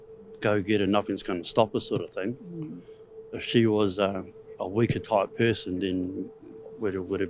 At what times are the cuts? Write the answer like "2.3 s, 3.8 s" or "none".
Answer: none